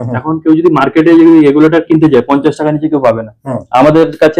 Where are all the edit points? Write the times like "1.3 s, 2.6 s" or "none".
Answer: none